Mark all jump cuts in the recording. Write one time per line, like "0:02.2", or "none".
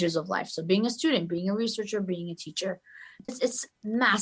0:03.3